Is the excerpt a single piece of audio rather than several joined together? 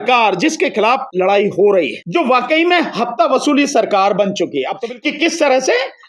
no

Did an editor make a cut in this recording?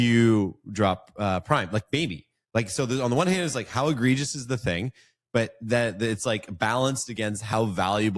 no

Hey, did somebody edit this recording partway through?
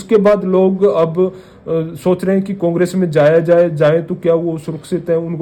no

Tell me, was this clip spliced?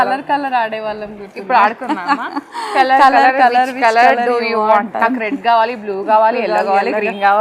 no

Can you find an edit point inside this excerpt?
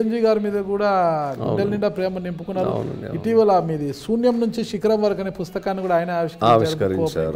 no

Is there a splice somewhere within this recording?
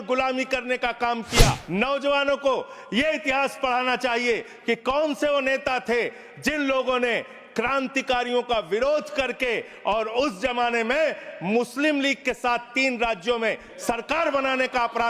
yes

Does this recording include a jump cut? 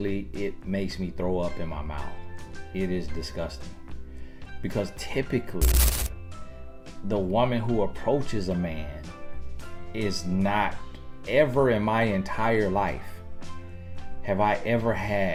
no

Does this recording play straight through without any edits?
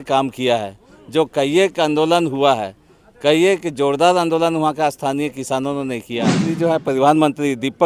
no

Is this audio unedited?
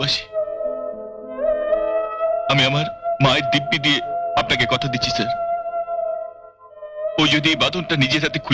yes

